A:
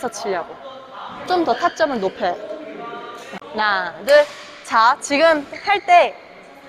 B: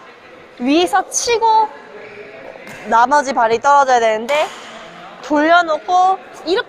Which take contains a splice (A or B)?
A